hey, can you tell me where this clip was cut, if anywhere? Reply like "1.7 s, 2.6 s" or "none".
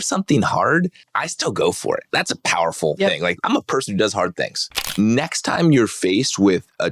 1.0 s, 2.1 s, 3.3 s, 4.8 s